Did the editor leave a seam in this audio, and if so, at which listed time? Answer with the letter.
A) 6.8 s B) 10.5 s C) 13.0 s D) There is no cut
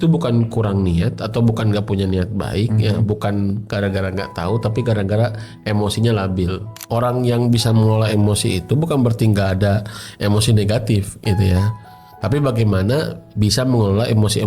A